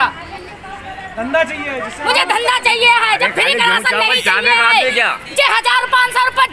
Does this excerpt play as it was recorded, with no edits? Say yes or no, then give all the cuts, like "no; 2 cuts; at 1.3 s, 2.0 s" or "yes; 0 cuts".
no; 1 cut; at 4.7 s